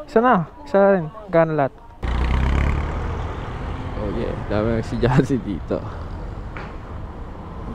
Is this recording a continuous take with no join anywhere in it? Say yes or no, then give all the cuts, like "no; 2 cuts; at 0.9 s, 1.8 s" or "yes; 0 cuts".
no; 1 cut; at 2.0 s